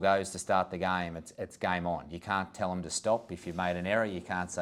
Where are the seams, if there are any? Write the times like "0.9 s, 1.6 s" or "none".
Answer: none